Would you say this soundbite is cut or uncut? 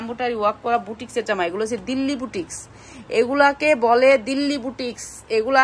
uncut